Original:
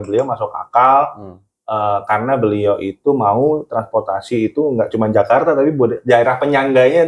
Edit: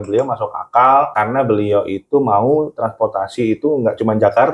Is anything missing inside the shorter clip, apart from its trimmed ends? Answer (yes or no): yes